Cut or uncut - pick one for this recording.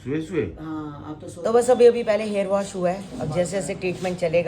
cut